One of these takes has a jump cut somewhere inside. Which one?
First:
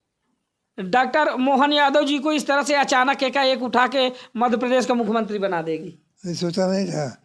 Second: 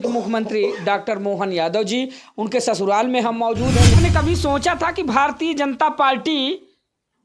second; 1 cut; at 3.9 s

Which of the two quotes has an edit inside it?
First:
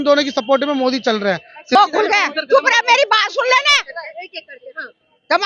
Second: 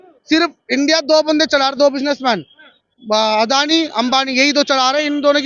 first; 1 cut; at 1.8 s

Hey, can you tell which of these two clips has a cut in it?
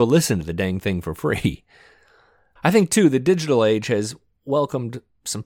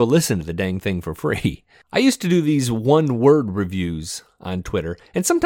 second; 1 cut; at 1.7 s

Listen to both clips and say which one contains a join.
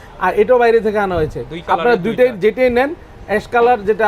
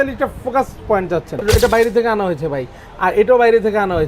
second; 1 cut; at 1.4 s

